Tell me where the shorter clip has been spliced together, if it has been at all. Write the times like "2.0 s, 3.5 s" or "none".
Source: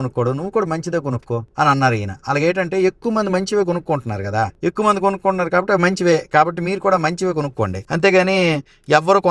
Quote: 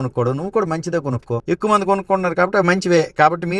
1.4 s

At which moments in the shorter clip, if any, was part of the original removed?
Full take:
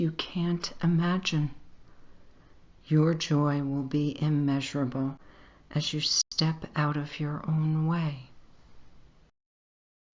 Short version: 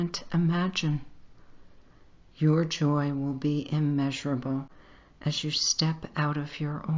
5.6 s

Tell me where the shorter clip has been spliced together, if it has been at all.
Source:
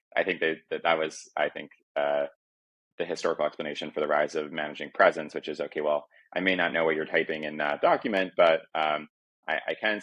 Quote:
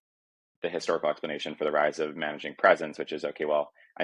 none

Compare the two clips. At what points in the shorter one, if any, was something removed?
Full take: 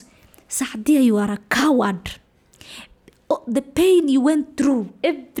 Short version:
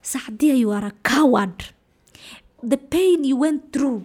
2.6 s

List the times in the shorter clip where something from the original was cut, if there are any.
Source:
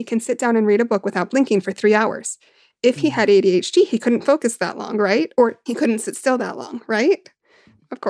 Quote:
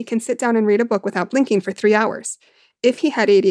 none

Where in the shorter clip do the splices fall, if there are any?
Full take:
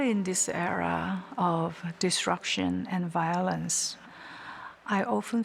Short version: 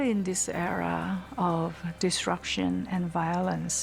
none

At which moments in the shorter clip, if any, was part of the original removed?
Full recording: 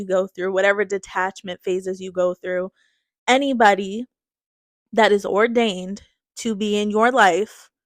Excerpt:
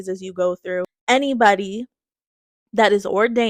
1.0 s

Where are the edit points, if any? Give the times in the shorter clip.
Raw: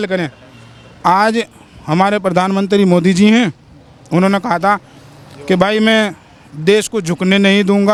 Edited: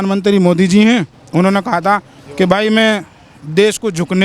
1.2 s, 2.2 s

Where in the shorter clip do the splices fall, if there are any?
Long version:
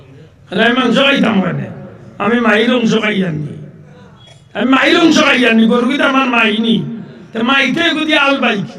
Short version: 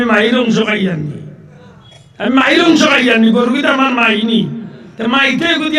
none

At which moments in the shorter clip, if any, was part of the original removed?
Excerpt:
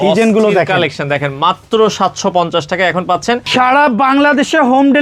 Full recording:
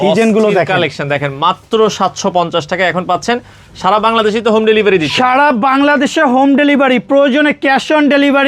3.5 s

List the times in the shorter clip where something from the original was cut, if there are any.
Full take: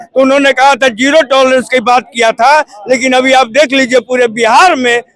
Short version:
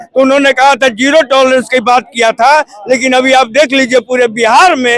none

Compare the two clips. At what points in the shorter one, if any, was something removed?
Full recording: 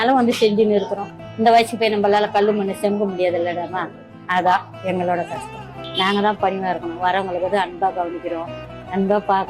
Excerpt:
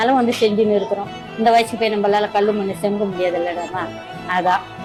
none

